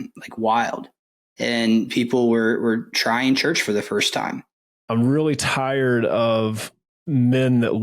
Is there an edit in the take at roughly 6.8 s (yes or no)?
no